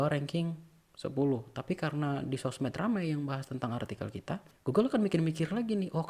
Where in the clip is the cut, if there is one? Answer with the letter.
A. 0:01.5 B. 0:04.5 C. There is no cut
B